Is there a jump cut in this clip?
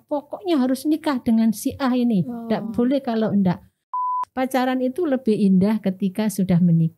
yes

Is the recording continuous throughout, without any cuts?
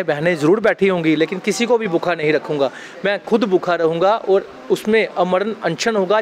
yes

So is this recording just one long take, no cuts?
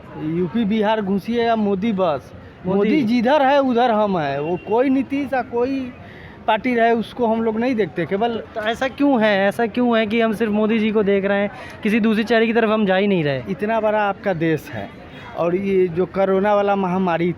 yes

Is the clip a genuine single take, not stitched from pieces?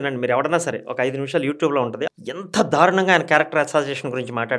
no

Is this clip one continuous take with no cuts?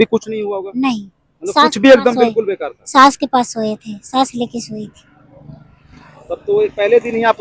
yes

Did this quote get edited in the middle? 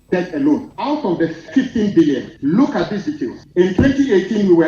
yes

